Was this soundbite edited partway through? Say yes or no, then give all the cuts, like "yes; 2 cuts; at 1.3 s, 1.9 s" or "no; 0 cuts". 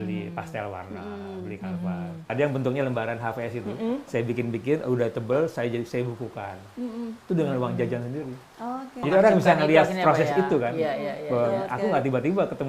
yes; 2 cuts; at 2.3 s, 9.0 s